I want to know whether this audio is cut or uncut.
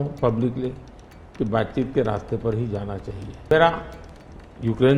cut